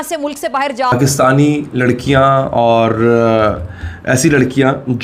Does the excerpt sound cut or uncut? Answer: cut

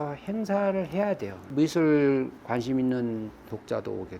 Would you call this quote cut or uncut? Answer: cut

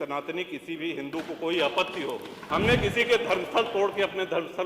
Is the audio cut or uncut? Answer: cut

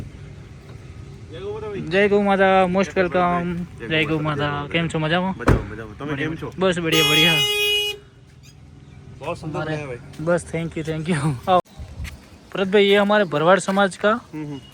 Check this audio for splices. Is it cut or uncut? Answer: cut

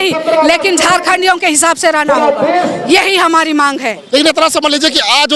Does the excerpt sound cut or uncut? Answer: cut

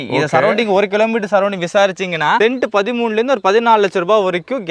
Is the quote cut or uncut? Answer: cut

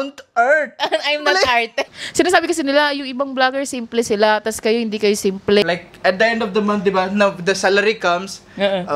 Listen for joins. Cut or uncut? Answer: cut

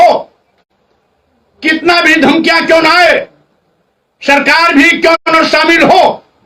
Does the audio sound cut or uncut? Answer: uncut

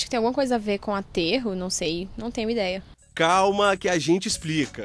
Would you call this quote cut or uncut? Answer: uncut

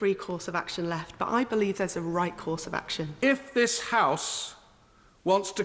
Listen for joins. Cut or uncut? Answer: cut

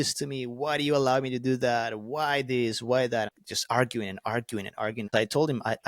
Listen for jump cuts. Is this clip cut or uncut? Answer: cut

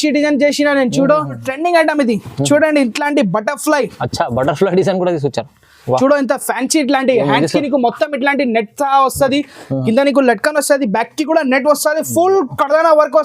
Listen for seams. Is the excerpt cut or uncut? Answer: cut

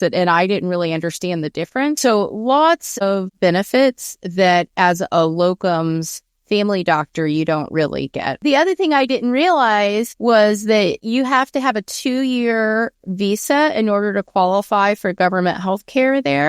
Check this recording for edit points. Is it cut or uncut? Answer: cut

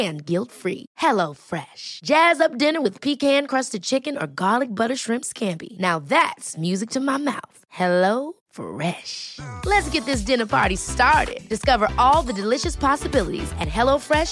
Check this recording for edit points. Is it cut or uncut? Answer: uncut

